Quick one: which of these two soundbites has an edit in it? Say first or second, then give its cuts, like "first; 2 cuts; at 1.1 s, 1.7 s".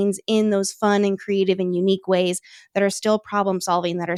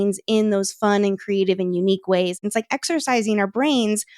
second; 1 cut; at 2.4 s